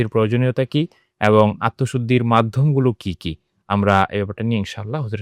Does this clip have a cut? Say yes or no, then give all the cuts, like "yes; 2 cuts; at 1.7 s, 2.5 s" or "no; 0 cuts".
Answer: no; 0 cuts